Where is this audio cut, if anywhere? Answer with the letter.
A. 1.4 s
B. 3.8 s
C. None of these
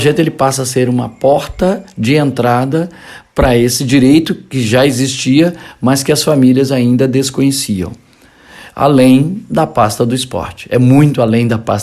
B